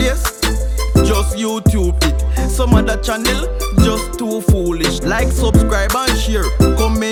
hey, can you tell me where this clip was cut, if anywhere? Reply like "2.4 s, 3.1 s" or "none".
none

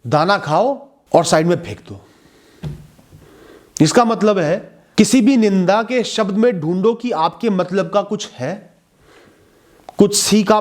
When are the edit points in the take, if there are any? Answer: 0.9 s, 4.8 s

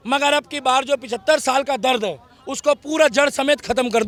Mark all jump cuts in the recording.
none

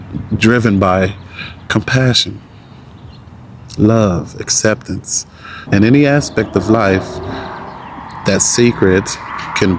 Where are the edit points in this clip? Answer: 5.6 s

